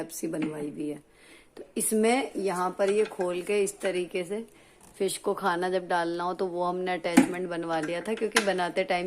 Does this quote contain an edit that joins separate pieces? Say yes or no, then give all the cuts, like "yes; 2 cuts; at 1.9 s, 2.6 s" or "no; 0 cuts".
no; 0 cuts